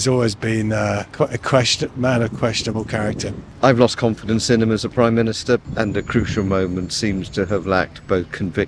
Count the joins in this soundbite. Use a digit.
2